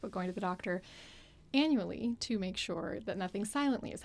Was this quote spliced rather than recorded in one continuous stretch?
no; 0 cuts

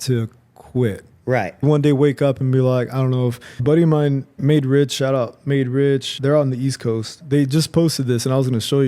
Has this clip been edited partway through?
yes; 2 cuts; at 3.5 s, 4.3 s

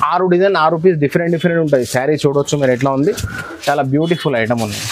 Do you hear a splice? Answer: no; 0 cuts

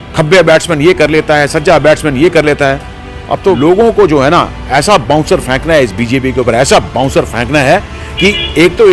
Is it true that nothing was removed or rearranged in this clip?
no; 1 cut; at 3.6 s

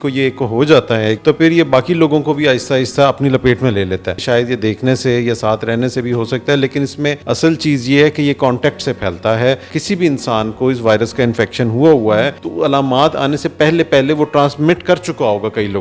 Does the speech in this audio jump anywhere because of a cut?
yes; 5 cuts; at 1.2 s, 4.2 s, 7.2 s, 9.7 s, 12.4 s

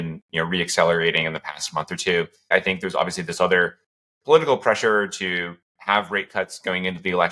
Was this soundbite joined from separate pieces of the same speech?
yes; 1 cut; at 2.5 s

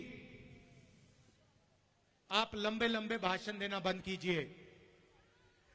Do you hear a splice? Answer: no; 0 cuts

